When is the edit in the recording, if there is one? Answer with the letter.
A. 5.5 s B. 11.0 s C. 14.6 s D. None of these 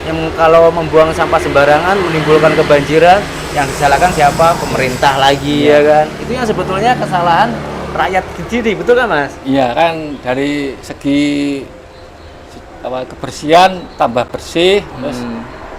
D